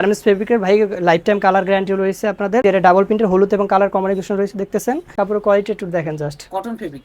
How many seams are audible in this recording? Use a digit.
2